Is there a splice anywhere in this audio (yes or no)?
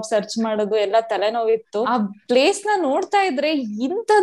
yes